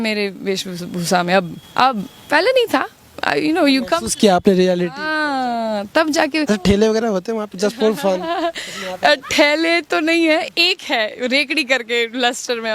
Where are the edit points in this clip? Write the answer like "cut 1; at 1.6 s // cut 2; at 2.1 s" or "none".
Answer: cut 1; at 1.6 s // cut 2; at 6.5 s